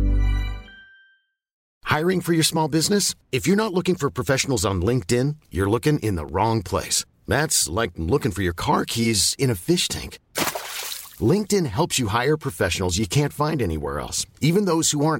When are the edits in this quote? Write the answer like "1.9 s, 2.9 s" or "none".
1.8 s